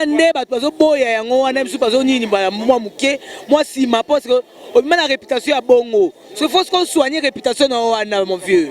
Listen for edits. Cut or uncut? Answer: uncut